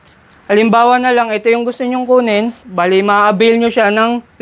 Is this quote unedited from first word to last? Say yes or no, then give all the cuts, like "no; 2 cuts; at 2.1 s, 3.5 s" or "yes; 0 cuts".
no; 1 cut; at 2.7 s